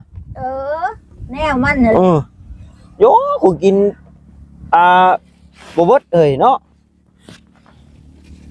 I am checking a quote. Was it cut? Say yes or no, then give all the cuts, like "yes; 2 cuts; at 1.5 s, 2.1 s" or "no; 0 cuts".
no; 0 cuts